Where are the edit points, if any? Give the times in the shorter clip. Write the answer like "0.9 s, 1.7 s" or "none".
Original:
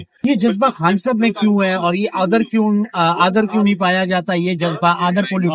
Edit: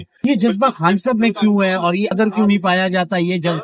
2.1 s